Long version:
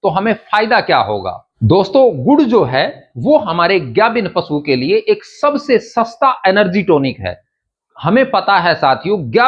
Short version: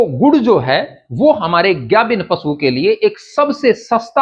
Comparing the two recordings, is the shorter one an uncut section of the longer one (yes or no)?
yes